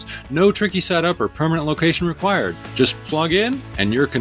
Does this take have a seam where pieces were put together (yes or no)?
no